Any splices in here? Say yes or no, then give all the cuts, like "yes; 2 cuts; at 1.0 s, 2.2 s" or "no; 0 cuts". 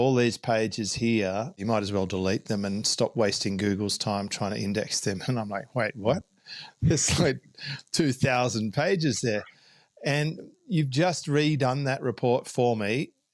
yes; 1 cut; at 1.6 s